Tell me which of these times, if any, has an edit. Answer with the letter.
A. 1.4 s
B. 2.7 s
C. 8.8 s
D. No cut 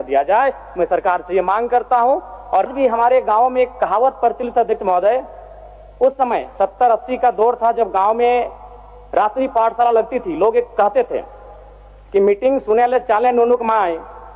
B